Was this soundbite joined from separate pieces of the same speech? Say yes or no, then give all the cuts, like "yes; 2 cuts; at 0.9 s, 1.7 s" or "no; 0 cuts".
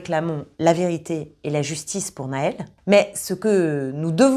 yes; 1 cut; at 2.7 s